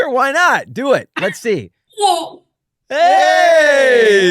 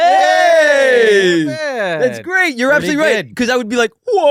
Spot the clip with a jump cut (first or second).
first